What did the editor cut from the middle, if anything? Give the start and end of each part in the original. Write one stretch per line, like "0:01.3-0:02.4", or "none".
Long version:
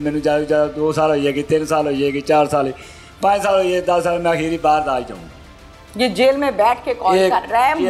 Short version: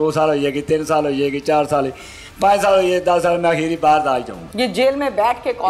0:05.2-0:05.8